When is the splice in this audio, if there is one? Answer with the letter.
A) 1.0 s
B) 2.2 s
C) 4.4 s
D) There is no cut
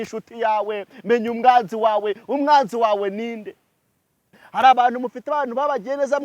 C